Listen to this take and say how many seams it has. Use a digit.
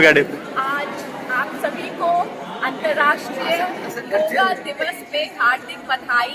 0